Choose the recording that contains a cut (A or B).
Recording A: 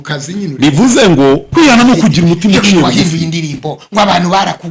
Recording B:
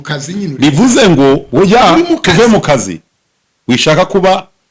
A